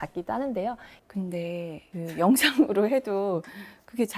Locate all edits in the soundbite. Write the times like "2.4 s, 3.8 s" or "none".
0.9 s